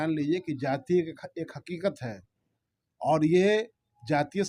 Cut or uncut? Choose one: uncut